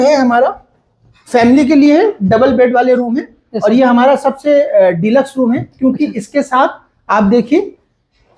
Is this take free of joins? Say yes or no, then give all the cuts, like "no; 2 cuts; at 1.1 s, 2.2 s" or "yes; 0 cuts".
yes; 0 cuts